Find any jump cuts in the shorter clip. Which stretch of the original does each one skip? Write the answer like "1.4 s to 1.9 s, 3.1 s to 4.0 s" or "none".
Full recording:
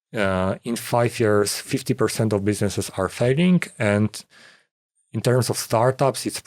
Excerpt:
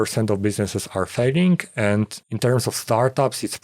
4.3 s to 5.1 s